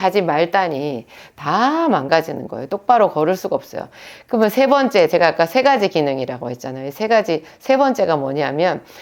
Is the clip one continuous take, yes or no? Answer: yes